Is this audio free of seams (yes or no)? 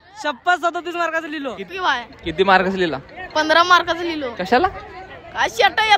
no